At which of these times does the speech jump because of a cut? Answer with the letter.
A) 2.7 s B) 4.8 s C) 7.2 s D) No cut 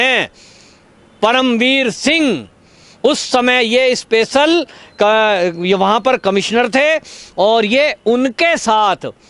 D